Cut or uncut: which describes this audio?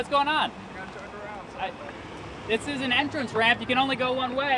uncut